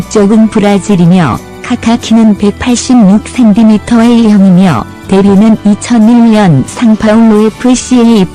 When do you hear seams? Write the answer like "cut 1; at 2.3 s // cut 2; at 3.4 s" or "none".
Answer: cut 1; at 3.0 s